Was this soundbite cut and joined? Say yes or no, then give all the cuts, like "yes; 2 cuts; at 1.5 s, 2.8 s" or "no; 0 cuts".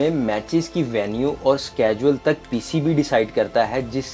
no; 0 cuts